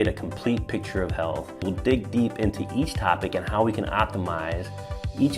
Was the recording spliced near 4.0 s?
no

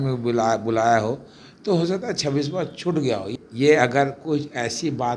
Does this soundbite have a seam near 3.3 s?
yes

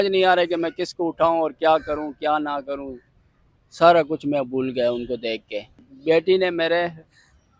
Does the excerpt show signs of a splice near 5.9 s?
yes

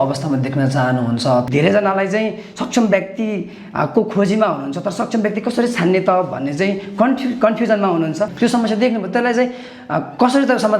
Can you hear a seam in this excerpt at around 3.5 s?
no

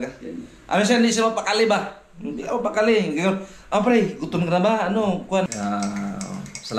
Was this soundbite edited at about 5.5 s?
yes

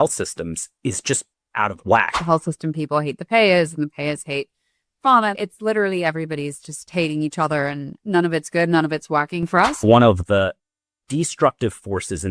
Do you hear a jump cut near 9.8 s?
yes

